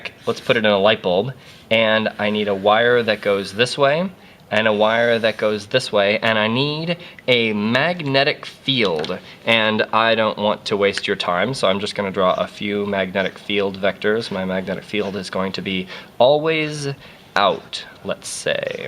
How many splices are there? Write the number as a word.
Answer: one